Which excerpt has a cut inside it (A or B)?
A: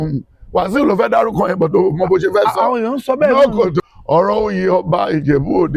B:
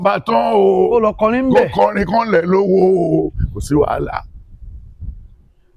A